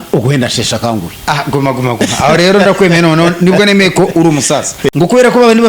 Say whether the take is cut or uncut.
cut